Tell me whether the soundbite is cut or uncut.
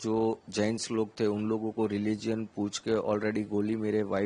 uncut